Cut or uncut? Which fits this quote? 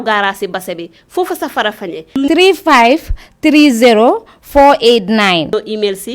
cut